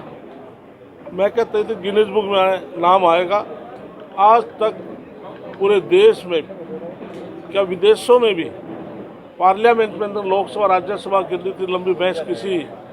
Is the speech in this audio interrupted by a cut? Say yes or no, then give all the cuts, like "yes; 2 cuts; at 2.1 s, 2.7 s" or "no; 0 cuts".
no; 0 cuts